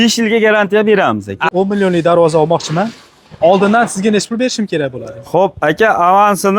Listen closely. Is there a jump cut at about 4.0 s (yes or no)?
no